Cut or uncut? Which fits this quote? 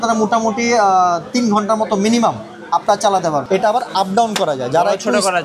cut